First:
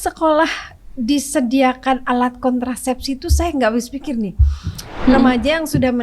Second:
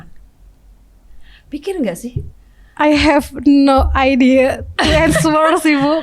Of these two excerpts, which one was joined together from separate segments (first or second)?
first